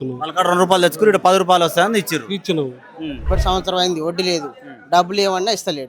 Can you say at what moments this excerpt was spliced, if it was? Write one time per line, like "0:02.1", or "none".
0:03.2